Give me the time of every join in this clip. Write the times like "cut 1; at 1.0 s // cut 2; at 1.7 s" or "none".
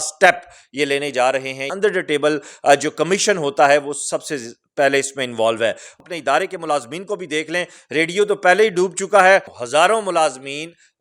cut 1; at 1.6 s // cut 2; at 6.0 s // cut 3; at 9.4 s

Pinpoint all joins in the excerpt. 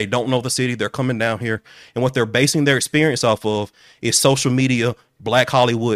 none

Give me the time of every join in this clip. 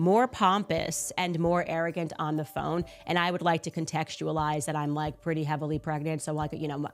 none

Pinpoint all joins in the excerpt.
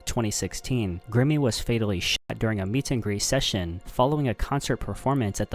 none

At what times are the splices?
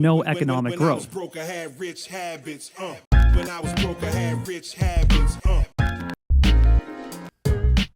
cut 1; at 1.2 s

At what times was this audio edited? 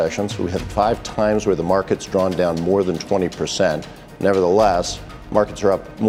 none

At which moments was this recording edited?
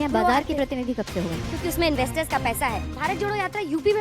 cut 1; at 1.5 s // cut 2; at 2.9 s

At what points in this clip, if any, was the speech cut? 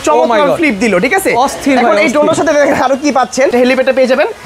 cut 1; at 3.5 s

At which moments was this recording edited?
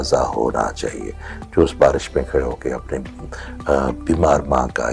none

